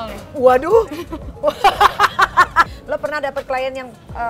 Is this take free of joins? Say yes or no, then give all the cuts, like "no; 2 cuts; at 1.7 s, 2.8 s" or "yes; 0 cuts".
no; 1 cut; at 2.7 s